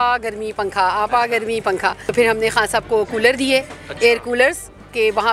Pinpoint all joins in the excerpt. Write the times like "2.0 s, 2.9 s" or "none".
2.0 s